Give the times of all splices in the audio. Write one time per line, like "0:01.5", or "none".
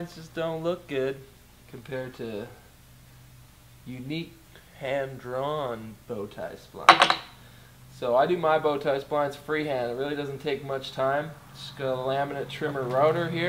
0:09.9

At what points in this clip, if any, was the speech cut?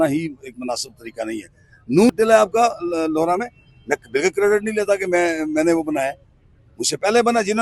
0:02.1

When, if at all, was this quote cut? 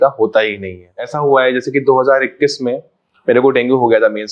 0:01.1

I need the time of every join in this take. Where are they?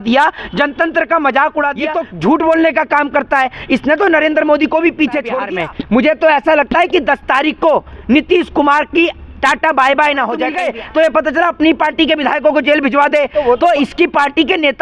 0:02.0
0:05.4
0:10.6

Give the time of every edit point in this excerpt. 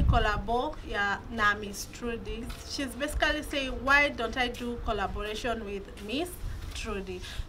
0:02.6

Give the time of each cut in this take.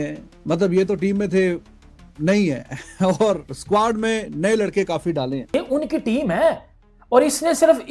0:05.5

